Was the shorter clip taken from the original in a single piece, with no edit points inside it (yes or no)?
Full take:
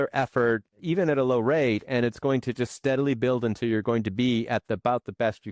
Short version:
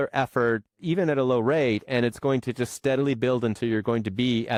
yes